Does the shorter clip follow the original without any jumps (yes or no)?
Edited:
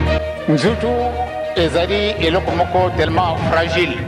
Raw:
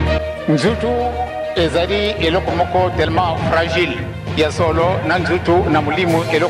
yes